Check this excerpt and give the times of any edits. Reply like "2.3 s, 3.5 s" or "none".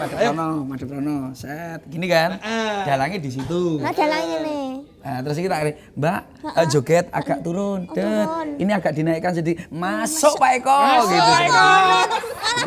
none